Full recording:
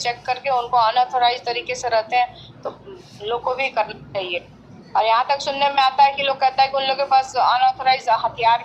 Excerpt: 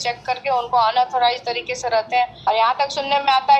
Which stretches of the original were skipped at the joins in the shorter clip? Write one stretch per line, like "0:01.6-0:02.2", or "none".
0:02.4-0:04.9